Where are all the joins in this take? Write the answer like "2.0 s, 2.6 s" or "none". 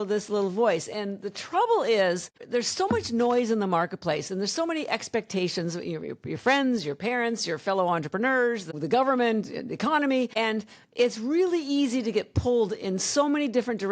2.4 s, 8.7 s, 10.3 s